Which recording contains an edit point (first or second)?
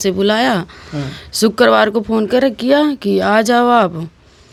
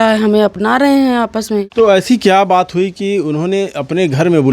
second